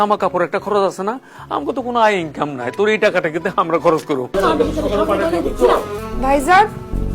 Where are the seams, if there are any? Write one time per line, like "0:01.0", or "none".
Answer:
0:04.3
0:06.0